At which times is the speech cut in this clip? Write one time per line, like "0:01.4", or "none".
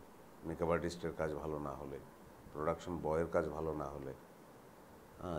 none